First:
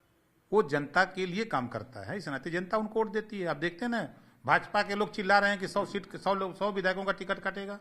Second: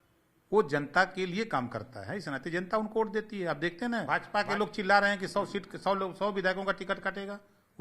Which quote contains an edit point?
second; 1 cut; at 4.1 s

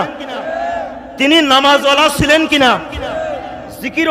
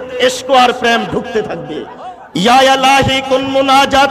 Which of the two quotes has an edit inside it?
second; 1 cut; at 2.0 s

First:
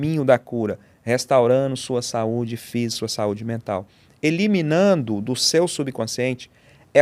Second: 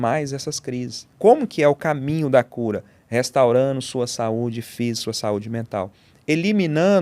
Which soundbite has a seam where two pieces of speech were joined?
second; 1 cut; at 1.1 s

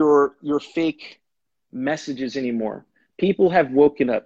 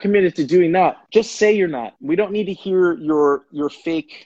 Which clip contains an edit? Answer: second; 2 cuts; at 1.0 s, 1.9 s

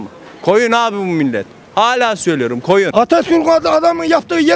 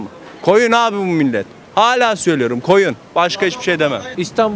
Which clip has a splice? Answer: first; 1 cut; at 2.9 s

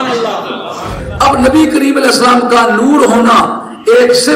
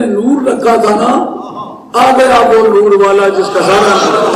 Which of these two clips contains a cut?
first; 1 cut; at 1.0 s

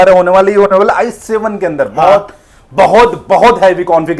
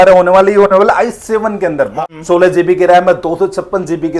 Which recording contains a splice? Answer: second; 1 cut; at 1.9 s

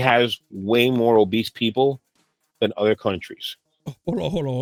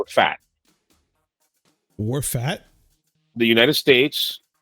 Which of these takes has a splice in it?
second; 1 cut; at 1.1 s

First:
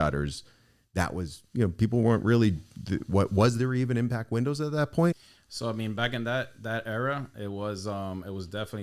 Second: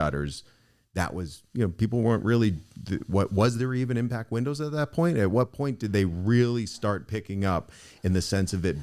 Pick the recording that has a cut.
first; 1 cut; at 5.1 s

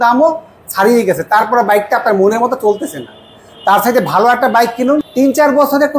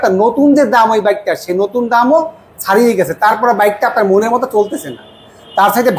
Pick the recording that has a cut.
first; 1 cut; at 5.1 s

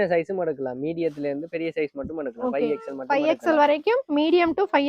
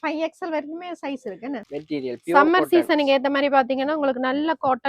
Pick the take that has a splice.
second; 1 cut; at 1.6 s

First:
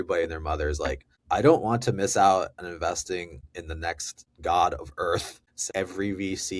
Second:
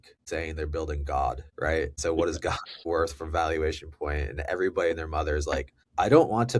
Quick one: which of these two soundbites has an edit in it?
first; 1 cut; at 5.5 s

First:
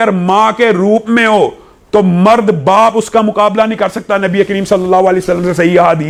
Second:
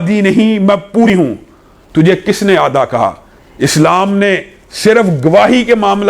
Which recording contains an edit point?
second; 1 cut; at 1.1 s

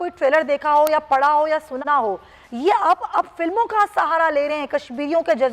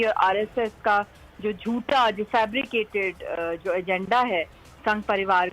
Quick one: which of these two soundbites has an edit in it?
first; 1 cut; at 1.7 s

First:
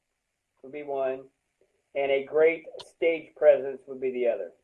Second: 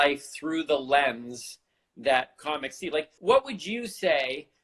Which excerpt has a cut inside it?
second; 1 cut; at 3.1 s

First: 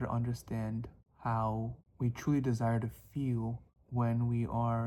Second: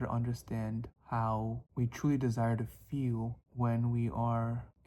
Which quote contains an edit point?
second; 3 cuts; at 0.9 s, 1.6 s, 3.4 s

